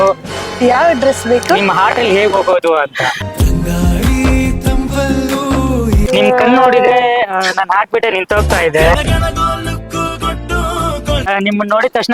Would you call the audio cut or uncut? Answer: cut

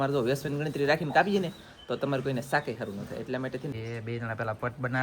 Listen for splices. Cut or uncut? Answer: cut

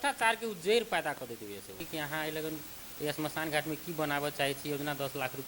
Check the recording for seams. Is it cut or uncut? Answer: cut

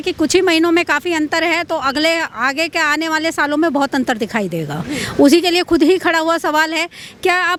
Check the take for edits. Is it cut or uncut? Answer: uncut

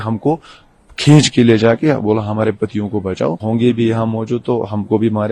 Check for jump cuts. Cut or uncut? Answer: cut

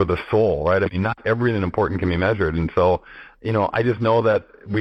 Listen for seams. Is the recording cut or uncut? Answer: uncut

